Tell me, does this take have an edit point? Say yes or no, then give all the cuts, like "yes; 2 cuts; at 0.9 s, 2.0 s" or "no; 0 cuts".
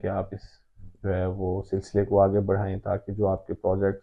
no; 0 cuts